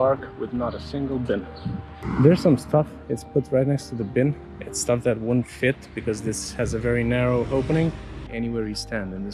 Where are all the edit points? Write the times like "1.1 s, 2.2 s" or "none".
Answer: 2.0 s, 8.1 s